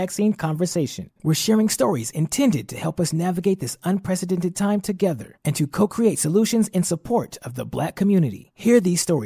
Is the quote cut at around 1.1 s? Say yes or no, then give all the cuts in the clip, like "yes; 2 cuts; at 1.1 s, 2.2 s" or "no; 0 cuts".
no; 0 cuts